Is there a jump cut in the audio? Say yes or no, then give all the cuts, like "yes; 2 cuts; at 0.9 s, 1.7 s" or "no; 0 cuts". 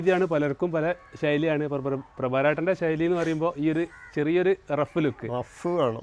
no; 0 cuts